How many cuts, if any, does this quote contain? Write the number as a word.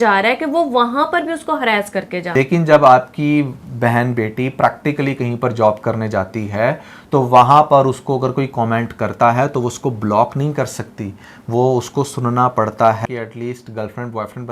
two